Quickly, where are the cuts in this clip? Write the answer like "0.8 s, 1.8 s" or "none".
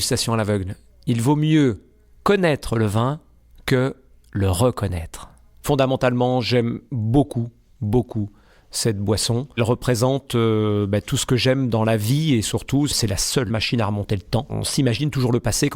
5.0 s, 9.6 s, 13.1 s, 14.6 s